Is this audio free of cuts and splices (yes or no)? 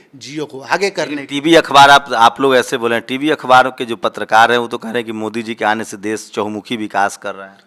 yes